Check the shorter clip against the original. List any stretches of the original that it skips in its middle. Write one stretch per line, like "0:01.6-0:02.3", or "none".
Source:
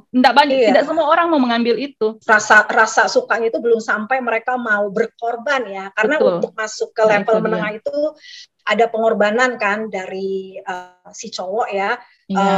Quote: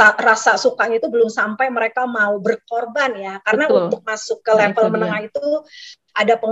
none